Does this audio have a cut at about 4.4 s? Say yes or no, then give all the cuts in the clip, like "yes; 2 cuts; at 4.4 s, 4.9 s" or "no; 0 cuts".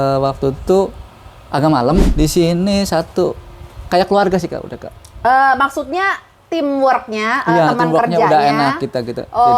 no; 1 cut; at 2.1 s